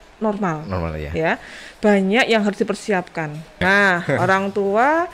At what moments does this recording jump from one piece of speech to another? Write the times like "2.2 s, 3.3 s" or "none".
3.6 s